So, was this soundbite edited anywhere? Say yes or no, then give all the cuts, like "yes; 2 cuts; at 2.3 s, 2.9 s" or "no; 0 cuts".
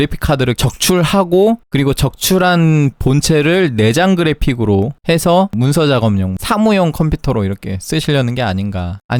no; 0 cuts